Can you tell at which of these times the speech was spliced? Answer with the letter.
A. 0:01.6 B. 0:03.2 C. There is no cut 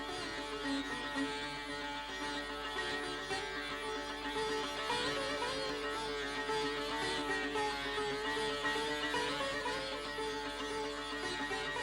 C